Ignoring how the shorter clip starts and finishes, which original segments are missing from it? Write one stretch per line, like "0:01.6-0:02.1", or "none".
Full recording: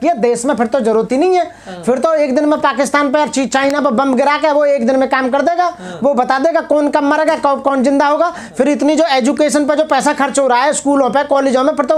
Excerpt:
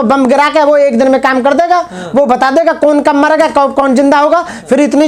none